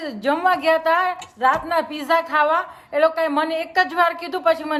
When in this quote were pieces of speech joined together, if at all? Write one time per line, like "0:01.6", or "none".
none